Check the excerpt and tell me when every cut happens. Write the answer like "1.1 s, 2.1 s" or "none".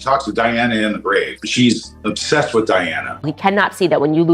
3.3 s